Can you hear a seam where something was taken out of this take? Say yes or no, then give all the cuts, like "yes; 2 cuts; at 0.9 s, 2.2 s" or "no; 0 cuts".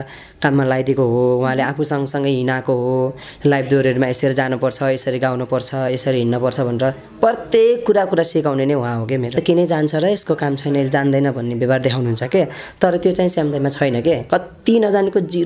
yes; 1 cut; at 9.3 s